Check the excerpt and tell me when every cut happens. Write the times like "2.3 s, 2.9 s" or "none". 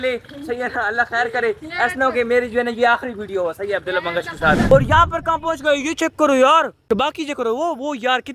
4.7 s

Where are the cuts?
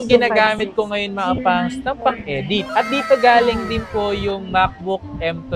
none

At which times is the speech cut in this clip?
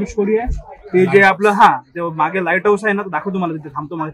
none

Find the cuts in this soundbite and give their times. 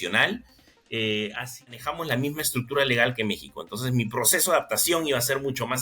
1.7 s

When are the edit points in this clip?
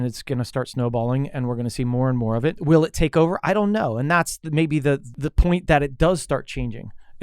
2.6 s, 5.1 s

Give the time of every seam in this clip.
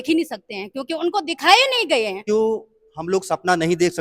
2.2 s

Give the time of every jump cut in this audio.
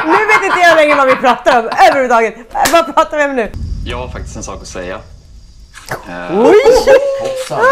3.5 s

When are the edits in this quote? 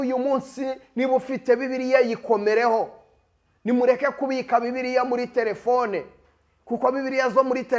none

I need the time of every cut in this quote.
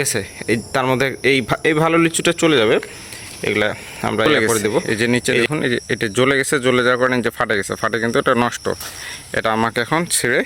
4.8 s

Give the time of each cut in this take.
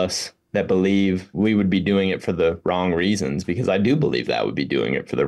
1.3 s

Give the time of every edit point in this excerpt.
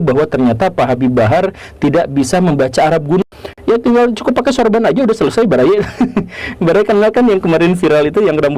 3.2 s

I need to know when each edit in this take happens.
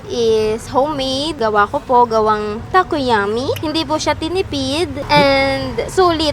1.3 s, 3.6 s, 5.0 s

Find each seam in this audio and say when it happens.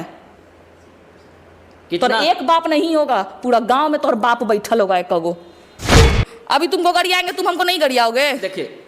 6.0 s

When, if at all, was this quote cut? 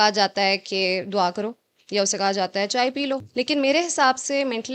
3.3 s

